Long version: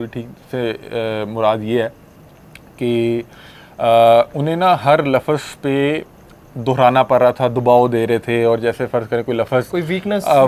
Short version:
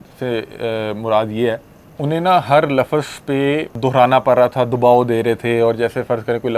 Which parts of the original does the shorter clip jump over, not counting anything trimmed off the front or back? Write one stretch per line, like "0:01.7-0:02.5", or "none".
0:02.3-0:04.3
0:06.1-0:06.5